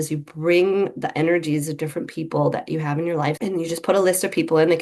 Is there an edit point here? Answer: yes; 1 cut; at 3.4 s

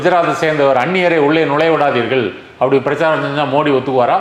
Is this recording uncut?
yes; 0 cuts

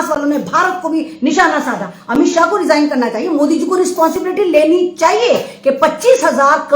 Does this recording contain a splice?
yes; 1 cut; at 1.9 s

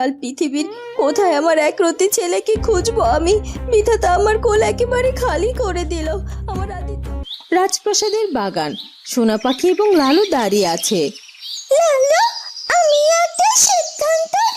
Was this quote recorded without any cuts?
no; 1 cut; at 7.1 s

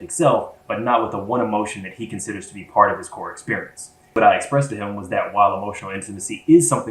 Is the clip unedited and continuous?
no; 1 cut; at 4.2 s

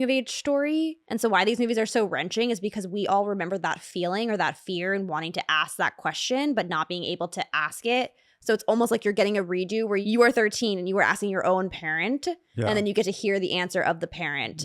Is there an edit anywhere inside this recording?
yes; 1 cut; at 1.0 s

